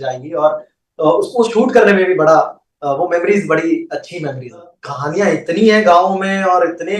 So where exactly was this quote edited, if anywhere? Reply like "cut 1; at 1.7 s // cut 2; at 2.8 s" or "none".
cut 1; at 4.8 s